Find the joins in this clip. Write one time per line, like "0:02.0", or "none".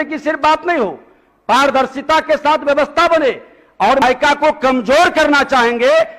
0:04.0